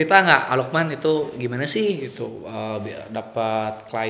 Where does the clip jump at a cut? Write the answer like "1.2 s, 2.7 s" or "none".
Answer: none